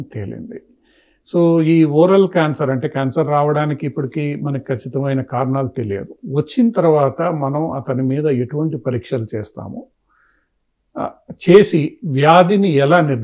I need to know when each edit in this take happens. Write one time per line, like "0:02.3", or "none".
none